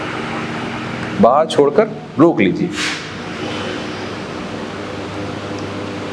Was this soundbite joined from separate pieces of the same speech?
no; 0 cuts

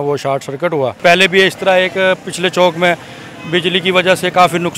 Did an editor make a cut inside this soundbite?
yes; 1 cut; at 1.0 s

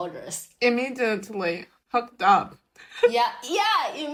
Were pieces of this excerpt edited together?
no; 0 cuts

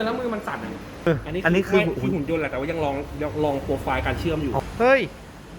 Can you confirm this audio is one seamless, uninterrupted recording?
no; 2 cuts; at 1.1 s, 4.6 s

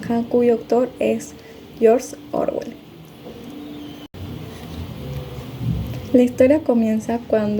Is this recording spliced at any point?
yes; 1 cut; at 4.0 s

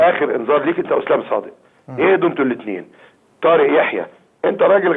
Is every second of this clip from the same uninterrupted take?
yes; 0 cuts

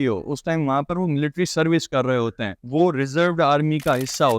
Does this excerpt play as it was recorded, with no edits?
no; 1 cut; at 2.6 s

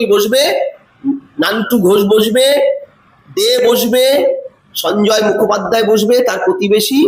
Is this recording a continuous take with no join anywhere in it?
yes; 0 cuts

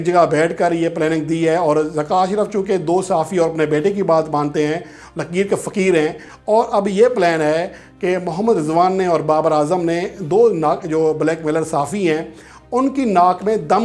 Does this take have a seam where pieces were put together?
yes; 1 cut; at 6.3 s

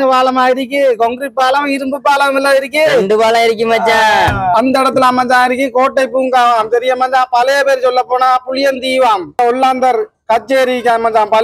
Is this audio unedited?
no; 2 cuts; at 4.6 s, 9.4 s

